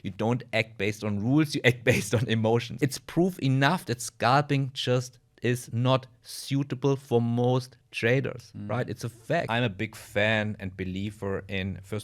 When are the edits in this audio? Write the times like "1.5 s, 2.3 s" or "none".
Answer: 2.7 s, 9.5 s